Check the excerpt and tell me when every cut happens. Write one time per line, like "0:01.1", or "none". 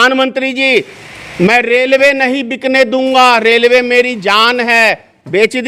none